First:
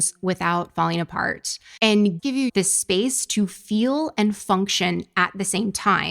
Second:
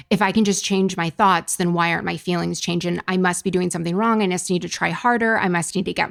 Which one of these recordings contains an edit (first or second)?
first